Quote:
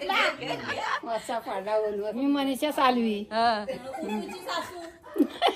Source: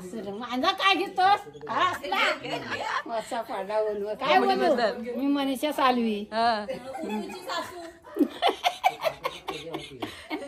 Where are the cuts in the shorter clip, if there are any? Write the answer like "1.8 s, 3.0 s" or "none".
2.1 s

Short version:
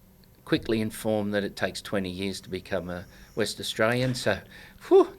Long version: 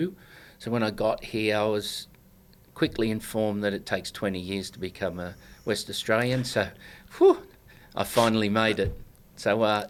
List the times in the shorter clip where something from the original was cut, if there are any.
none

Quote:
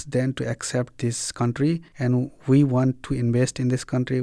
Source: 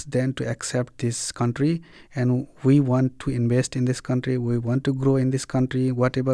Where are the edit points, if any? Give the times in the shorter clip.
1.9 s

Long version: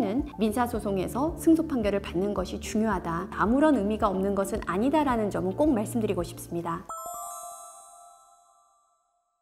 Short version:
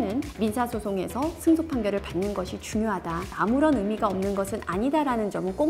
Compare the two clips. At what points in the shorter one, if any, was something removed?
none

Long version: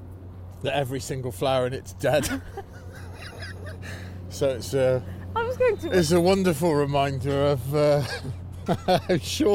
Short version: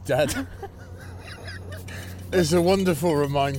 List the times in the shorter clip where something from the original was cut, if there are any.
2.2 s

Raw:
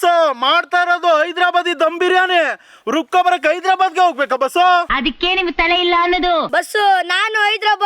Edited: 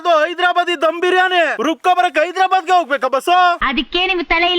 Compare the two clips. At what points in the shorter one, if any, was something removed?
1.6 s

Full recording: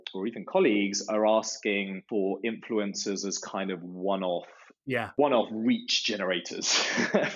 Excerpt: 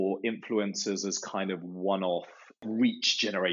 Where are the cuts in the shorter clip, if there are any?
2.6 s

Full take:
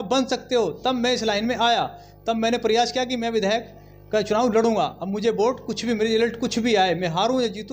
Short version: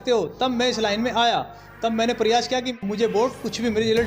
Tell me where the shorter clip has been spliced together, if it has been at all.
2.7 s

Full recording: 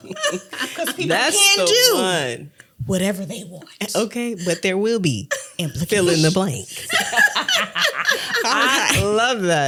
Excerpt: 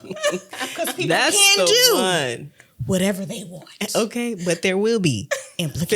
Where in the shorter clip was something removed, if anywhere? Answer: none

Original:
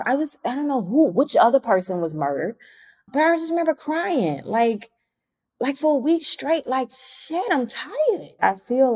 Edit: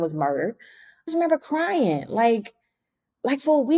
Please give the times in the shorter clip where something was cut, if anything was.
1.1 s

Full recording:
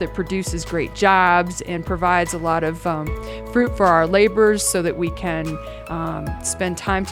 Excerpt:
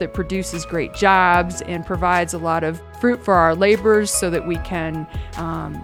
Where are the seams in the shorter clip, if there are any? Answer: 2.8 s

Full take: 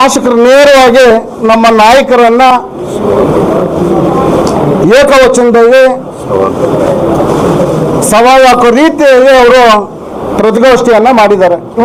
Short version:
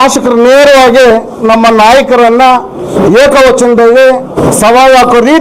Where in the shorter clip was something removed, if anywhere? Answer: 2.9 s, 4.3 s

